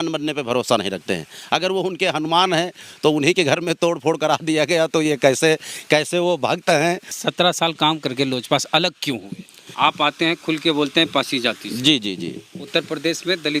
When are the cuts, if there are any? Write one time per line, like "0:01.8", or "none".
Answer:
0:07.1
0:09.7

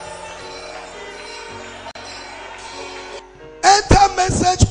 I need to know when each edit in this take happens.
0:03.2

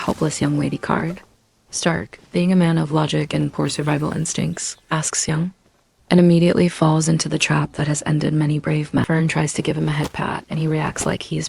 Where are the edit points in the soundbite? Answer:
0:09.1

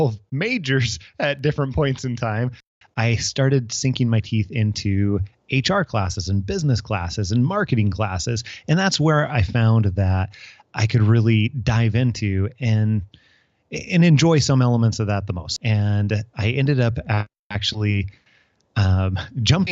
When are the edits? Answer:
0:02.7
0:15.4

